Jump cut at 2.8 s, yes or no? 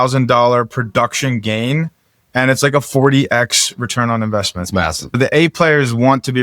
no